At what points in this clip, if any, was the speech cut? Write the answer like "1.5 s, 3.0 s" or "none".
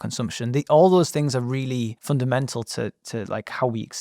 2.0 s